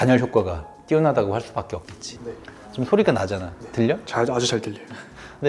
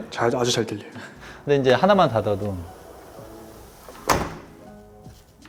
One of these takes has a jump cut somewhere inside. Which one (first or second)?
first